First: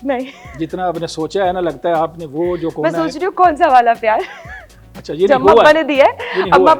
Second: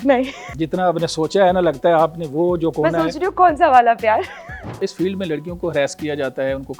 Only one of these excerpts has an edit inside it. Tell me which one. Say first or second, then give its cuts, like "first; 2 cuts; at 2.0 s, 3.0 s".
second; 1 cut; at 4.9 s